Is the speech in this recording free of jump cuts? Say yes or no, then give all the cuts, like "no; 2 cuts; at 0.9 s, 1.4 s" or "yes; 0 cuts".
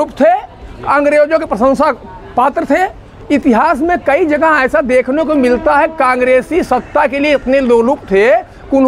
yes; 0 cuts